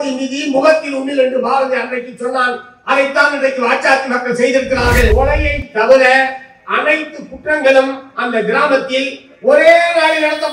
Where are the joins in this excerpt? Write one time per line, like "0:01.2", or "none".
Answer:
0:05.1